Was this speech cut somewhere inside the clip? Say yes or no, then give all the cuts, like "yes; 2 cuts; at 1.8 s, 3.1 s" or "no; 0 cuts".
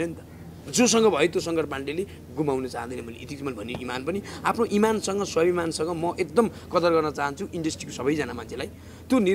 no; 0 cuts